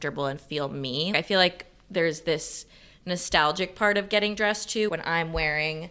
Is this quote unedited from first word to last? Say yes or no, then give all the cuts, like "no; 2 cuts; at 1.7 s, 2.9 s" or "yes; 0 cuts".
no; 2 cuts; at 1.1 s, 4.9 s